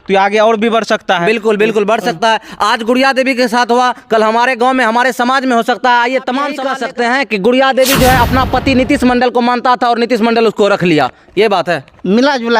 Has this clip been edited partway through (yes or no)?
yes